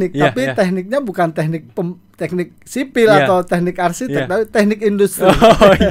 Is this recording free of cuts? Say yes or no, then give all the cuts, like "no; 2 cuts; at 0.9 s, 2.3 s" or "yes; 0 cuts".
yes; 0 cuts